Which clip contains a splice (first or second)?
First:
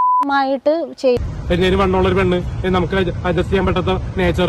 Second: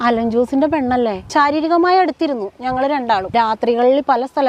first